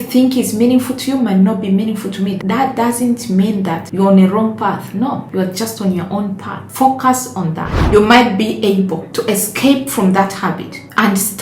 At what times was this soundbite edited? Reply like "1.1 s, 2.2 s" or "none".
2.4 s, 7.8 s